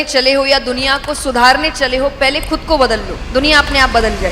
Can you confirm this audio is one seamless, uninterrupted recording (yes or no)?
no